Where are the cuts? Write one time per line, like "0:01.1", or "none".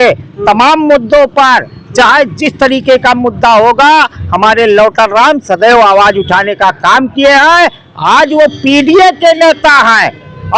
none